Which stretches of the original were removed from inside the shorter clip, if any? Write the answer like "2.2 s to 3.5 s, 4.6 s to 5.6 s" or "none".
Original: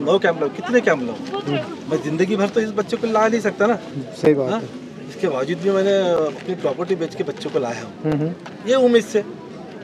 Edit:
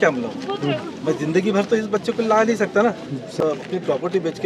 4.2 s to 6.2 s